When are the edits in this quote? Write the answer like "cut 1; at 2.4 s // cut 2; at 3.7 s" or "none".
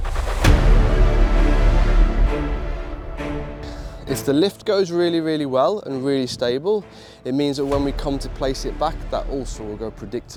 none

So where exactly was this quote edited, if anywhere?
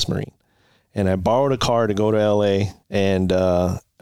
cut 1; at 2.8 s

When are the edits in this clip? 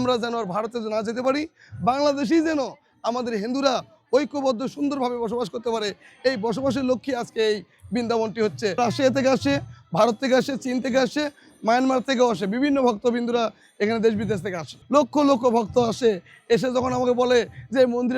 cut 1; at 8.8 s // cut 2; at 14.7 s

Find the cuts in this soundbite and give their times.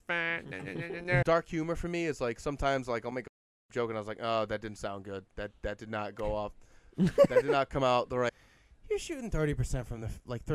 cut 1; at 1.2 s // cut 2; at 8.3 s

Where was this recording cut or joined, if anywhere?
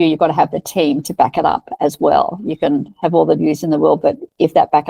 none

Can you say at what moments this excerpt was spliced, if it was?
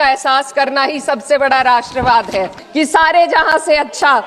cut 1; at 2.6 s

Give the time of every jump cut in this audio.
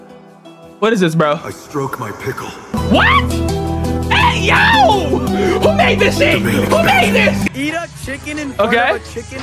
cut 1; at 7.5 s

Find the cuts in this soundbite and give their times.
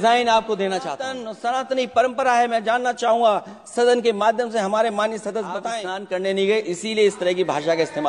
cut 1; at 1.3 s // cut 2; at 5.7 s

